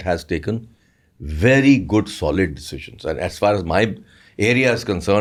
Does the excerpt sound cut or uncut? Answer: uncut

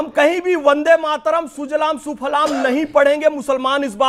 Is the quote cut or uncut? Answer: uncut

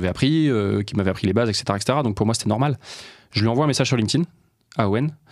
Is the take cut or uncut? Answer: uncut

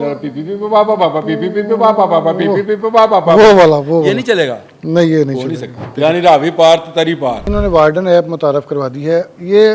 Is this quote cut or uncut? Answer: cut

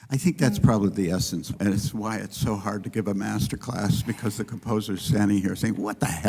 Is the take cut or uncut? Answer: cut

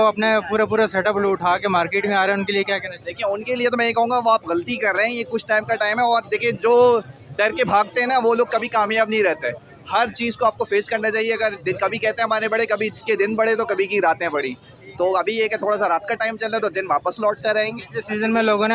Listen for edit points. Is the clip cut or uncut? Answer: uncut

